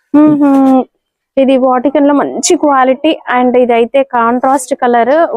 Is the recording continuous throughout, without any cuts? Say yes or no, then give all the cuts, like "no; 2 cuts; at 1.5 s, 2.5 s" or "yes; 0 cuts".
yes; 0 cuts